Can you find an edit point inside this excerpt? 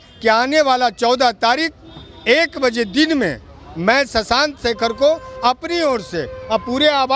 no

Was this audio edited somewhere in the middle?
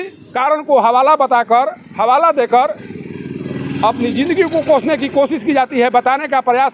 no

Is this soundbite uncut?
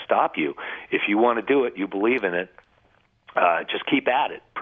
yes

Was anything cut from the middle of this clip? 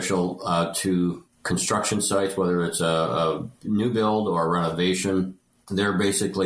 no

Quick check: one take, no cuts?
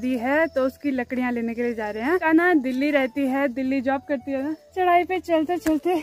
no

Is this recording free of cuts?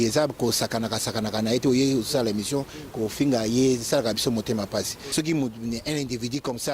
no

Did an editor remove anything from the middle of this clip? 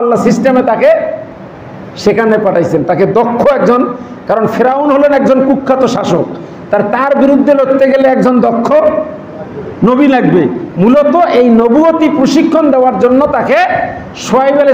no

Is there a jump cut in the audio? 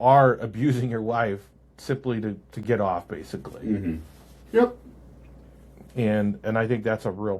no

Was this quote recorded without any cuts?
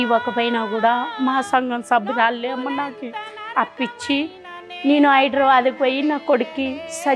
yes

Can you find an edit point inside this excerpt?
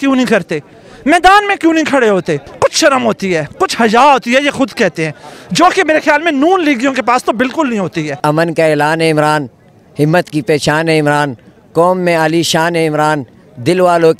yes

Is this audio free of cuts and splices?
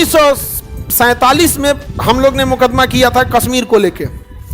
no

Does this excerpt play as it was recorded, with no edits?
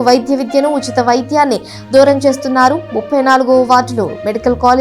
yes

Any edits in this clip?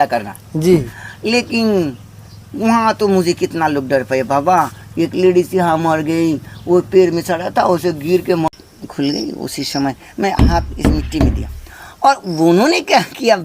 yes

